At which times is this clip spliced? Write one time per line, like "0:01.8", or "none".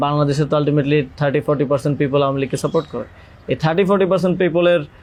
none

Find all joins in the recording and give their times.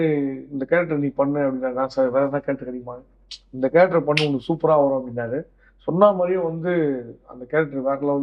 none

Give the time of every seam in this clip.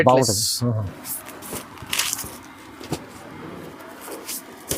none

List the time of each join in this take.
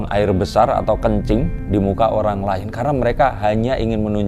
none

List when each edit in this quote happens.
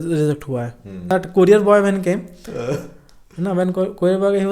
0:01.0

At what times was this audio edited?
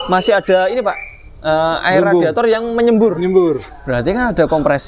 none

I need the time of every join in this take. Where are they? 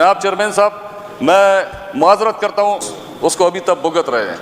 0:02.8

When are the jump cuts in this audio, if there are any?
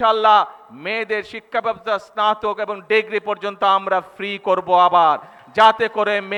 none

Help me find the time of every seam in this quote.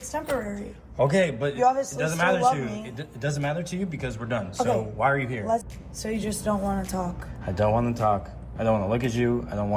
0:05.7

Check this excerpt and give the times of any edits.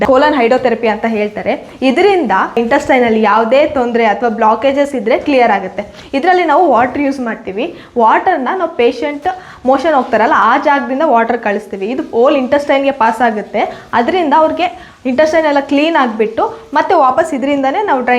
none

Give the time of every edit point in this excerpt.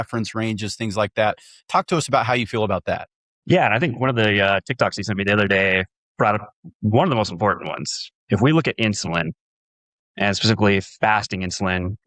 none

